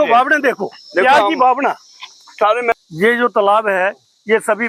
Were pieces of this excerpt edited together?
yes; 1 cut; at 2.7 s

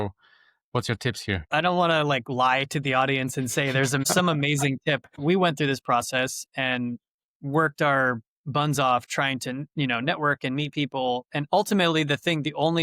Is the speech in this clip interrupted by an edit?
yes; 3 cuts; at 1.4 s, 4.1 s, 5.2 s

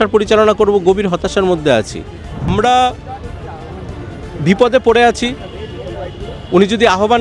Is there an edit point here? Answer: yes; 1 cut; at 2.5 s

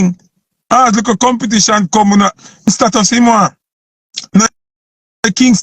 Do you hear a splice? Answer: yes; 1 cut; at 2.7 s

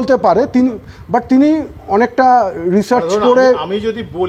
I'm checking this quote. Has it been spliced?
yes; 1 cut; at 3.1 s

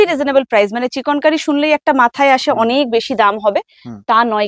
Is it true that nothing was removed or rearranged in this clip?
yes; 0 cuts

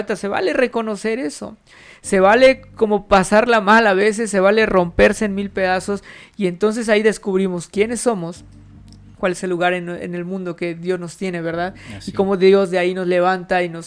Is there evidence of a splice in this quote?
no; 0 cuts

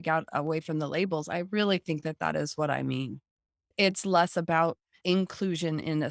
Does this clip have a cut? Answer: yes; 1 cut; at 5.0 s

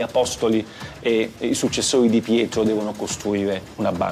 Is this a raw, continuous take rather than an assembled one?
yes; 0 cuts

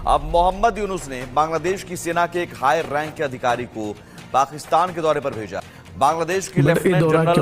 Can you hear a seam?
no; 0 cuts

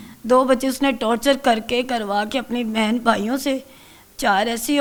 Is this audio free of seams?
yes; 0 cuts

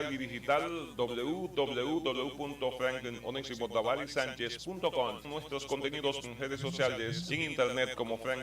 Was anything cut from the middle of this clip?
yes; 3 cuts; at 5.3 s, 6.2 s, 7.2 s

